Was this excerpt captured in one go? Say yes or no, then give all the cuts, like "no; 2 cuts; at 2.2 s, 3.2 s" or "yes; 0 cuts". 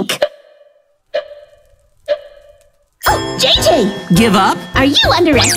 no; 1 cut; at 3.4 s